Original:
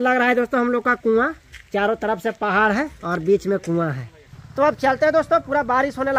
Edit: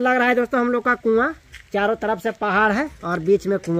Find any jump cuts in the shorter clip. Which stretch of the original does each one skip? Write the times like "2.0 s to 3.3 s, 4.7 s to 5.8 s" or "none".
none

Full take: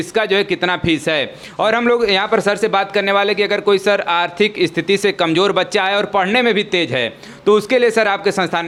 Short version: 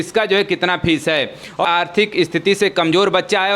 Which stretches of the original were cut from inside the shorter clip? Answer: 1.6 s to 4.1 s

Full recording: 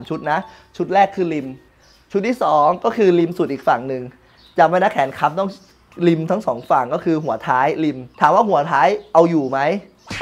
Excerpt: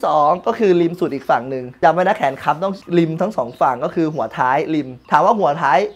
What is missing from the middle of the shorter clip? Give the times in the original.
4.0 s to 4.4 s, 5.6 s to 5.9 s

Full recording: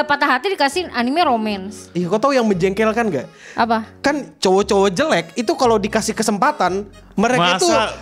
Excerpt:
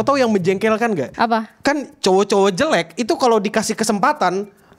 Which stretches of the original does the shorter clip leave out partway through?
3.2 s to 3.5 s

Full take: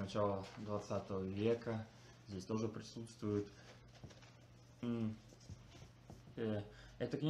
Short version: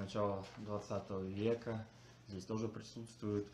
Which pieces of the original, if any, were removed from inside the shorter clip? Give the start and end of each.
none

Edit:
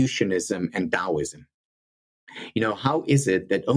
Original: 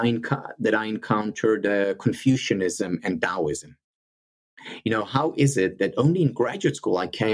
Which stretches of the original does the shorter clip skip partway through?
none

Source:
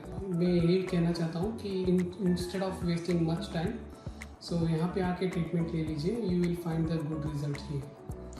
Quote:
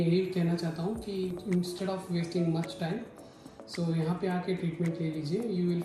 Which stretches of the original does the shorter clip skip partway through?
1.9 s to 2.0 s

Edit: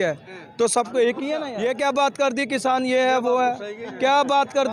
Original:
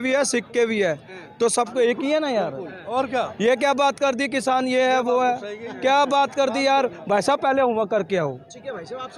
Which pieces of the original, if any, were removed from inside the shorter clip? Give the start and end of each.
2.3 s to 3.3 s

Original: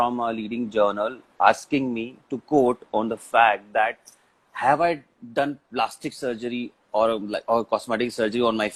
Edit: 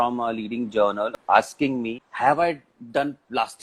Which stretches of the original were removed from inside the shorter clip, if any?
1.2 s to 1.3 s, 2.1 s to 4.4 s

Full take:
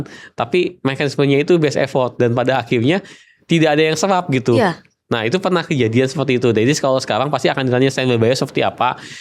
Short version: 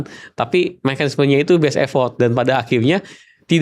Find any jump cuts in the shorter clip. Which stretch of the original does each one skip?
none

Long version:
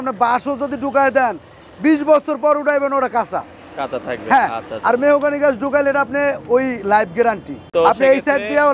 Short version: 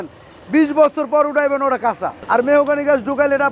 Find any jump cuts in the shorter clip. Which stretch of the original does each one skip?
3.5 s to 4.7 s

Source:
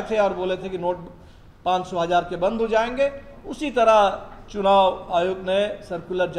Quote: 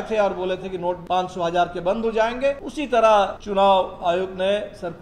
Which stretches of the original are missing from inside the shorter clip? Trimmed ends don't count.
1.0 s to 1.6 s, 3.3 s to 3.5 s, 4.2 s to 4.5 s

